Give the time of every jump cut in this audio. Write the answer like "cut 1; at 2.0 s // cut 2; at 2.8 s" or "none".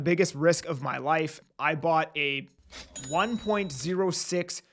cut 1; at 1.5 s